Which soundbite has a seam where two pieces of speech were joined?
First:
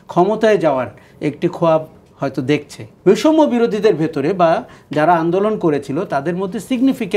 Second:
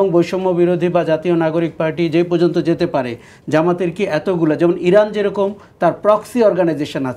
first; 1 cut; at 2.9 s

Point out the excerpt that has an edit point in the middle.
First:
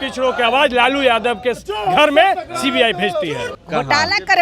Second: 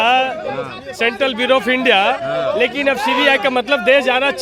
first; 1 cut; at 3.5 s

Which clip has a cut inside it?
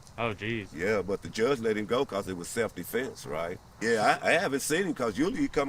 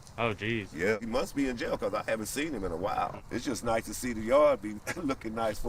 second; 2 cuts; at 1.0 s, 3.2 s

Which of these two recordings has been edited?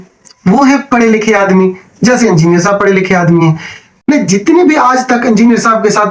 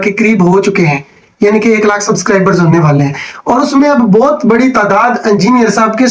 first; 1 cut; at 4.1 s

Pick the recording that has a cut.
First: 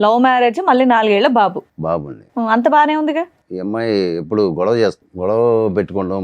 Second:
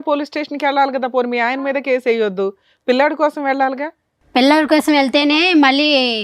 first; 2 cuts; at 3.4 s, 5.1 s

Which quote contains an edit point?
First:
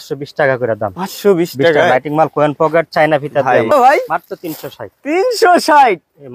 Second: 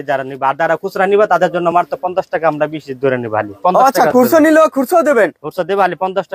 first; 1 cut; at 3.7 s

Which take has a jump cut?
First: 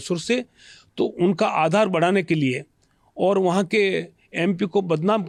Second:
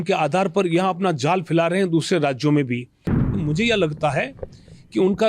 second; 1 cut; at 3.3 s

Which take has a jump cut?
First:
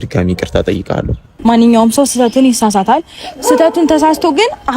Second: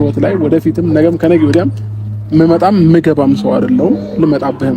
first; 1 cut; at 1.2 s

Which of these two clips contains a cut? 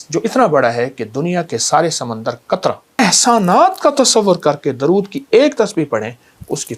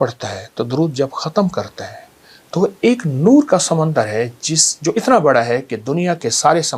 first; 1 cut; at 3.0 s

